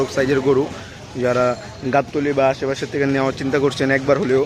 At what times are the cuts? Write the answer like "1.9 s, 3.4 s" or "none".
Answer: none